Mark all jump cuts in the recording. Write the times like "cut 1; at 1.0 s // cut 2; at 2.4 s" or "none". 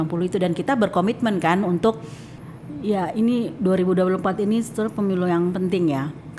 cut 1; at 2.1 s